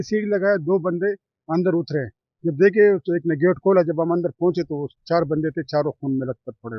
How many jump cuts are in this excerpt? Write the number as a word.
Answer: zero